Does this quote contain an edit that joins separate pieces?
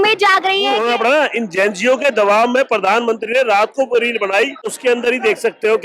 yes; 2 cuts; at 0.8 s, 4.8 s

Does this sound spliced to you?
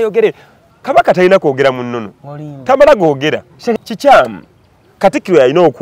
yes; 1 cut; at 3.8 s

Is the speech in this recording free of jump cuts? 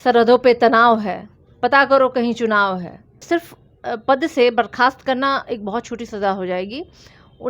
no; 1 cut; at 3.2 s

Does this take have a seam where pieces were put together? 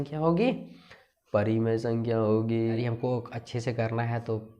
yes; 1 cut; at 2.9 s

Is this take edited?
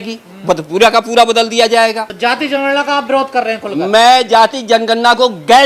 yes; 1 cut; at 2.1 s

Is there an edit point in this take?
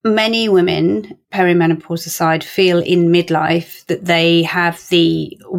yes; 1 cut; at 1.2 s

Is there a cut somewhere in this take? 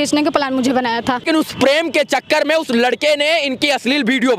yes; 1 cut; at 1.3 s

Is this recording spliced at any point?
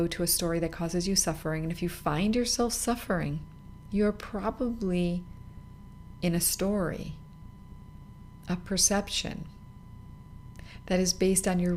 no; 0 cuts

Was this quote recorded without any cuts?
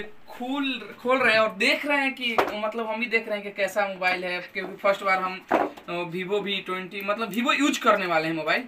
yes; 0 cuts

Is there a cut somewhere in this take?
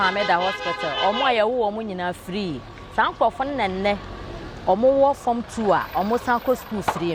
no; 0 cuts

